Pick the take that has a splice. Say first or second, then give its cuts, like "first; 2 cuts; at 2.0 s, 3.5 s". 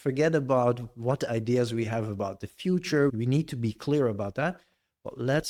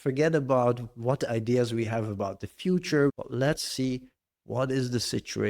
second; 1 cut; at 3.2 s